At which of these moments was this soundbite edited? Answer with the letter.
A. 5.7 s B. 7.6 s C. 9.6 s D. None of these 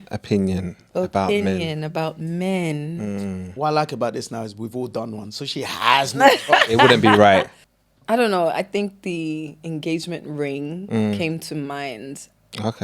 B